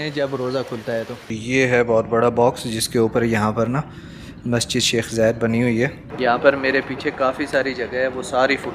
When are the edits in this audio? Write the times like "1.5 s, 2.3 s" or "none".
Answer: 1.4 s, 6.1 s